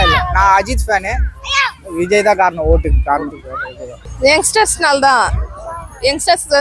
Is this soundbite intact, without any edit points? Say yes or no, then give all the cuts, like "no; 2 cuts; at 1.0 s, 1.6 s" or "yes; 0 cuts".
no; 1 cut; at 4.0 s